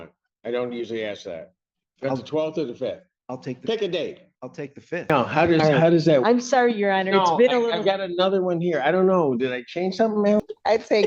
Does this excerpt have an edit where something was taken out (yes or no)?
yes